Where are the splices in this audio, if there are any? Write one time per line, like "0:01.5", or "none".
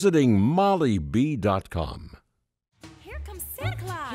0:03.0